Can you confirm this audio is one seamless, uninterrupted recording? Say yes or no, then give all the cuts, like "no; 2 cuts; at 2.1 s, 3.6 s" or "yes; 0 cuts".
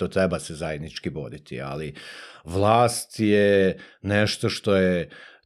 yes; 0 cuts